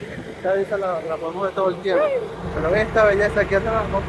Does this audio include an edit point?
no; 0 cuts

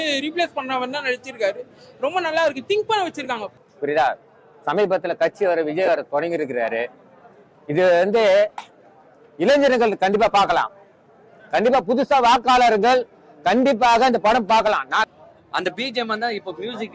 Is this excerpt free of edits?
no; 2 cuts; at 3.5 s, 15.0 s

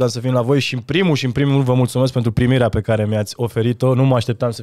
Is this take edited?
no; 0 cuts

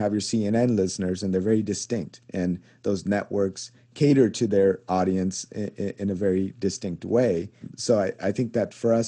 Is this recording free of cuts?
no; 1 cut; at 7.7 s

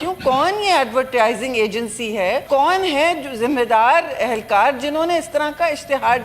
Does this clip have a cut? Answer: yes; 1 cut; at 2.4 s

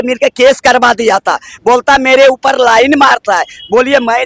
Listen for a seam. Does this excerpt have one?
no; 0 cuts

